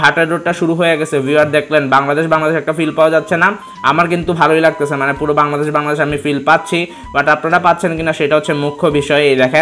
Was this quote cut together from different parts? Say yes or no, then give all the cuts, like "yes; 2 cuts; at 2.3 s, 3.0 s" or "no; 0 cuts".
no; 0 cuts